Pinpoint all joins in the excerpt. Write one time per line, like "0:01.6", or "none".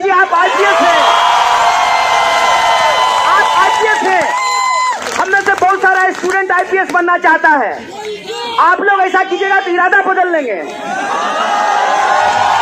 none